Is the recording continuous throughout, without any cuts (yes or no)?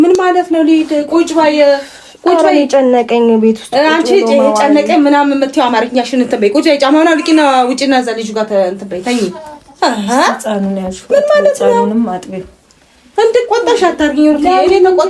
yes